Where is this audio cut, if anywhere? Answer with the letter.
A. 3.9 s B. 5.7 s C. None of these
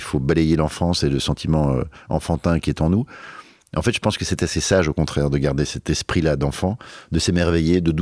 B